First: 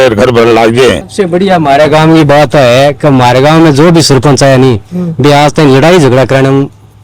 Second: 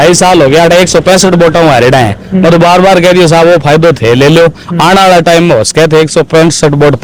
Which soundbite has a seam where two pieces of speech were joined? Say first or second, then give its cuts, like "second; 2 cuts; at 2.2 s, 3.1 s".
first; 1 cut; at 1.1 s